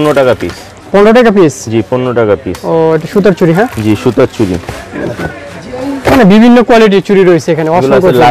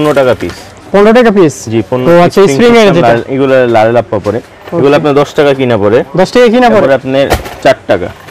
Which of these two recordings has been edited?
second; 2 cuts; at 2.0 s, 6.8 s

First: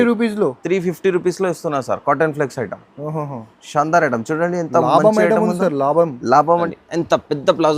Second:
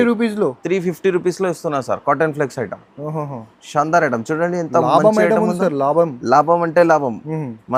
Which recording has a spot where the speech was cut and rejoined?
first; 1 cut; at 6.7 s

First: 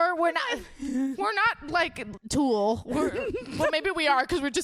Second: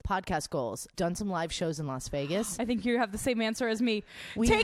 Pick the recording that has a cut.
second; 1 cut; at 0.9 s

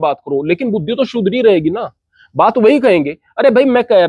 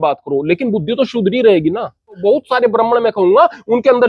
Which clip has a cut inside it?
second; 1 cut; at 2.2 s

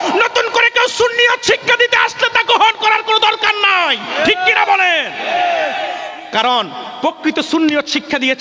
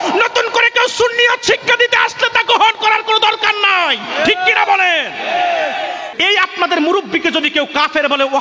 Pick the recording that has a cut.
second; 1 cut; at 6.1 s

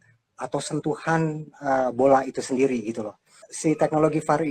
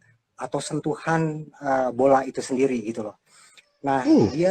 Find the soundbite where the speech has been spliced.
first; 1 cut; at 3.5 s

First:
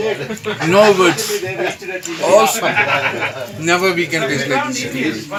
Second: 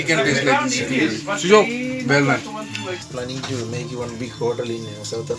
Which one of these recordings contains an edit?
second; 1 cut; at 3.1 s

